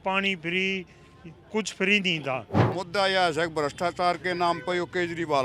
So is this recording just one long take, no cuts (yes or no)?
no